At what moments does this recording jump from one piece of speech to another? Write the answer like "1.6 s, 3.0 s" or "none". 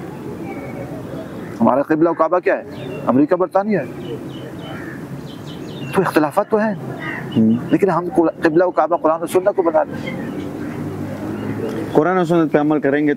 none